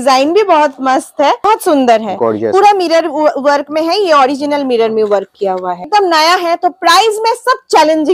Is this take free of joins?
no; 2 cuts; at 1.5 s, 5.9 s

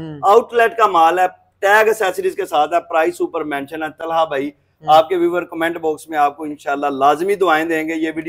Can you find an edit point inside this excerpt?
no; 0 cuts

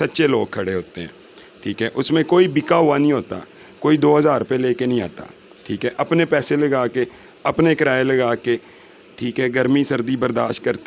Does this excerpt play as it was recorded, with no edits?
yes; 0 cuts

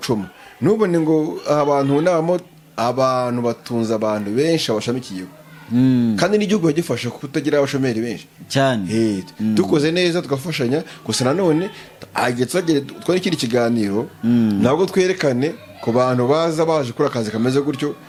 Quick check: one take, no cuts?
yes; 0 cuts

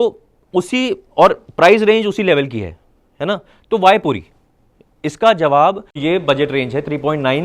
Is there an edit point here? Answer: yes; 1 cut; at 6.0 s

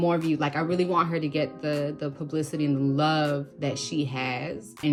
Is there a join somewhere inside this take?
no; 0 cuts

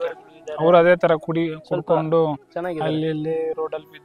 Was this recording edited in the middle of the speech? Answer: no; 0 cuts

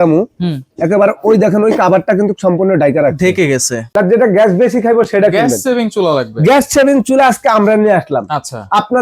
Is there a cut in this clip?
yes; 1 cut; at 3.8 s

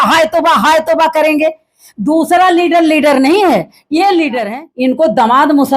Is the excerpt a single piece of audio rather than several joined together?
no; 1 cut; at 4.6 s

